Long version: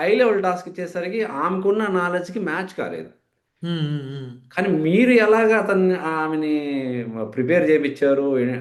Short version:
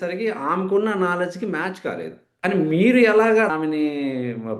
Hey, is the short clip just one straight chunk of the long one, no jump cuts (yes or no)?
no